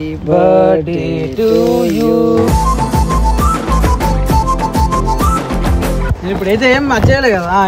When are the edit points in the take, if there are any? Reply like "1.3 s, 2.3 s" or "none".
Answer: 6.1 s